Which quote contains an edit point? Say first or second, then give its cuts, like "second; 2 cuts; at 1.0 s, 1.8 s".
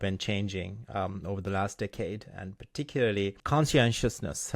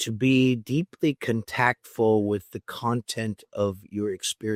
first; 1 cut; at 3.4 s